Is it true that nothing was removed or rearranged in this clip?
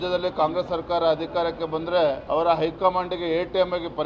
yes; 0 cuts

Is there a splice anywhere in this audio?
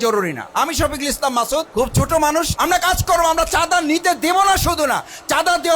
yes; 2 cuts; at 1.7 s, 2.5 s

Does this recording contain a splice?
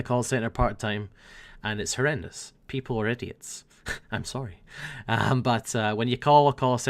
yes; 1 cut; at 6.0 s

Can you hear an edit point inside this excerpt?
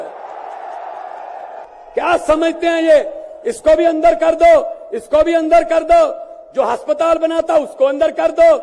yes; 1 cut; at 1.7 s

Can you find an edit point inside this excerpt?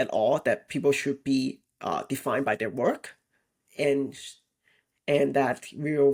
no; 0 cuts

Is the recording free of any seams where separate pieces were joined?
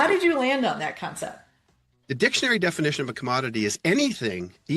no; 1 cut; at 2.0 s

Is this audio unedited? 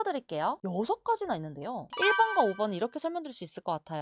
no; 1 cut; at 1.9 s

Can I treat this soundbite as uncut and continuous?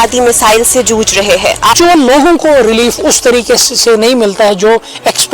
no; 1 cut; at 1.7 s

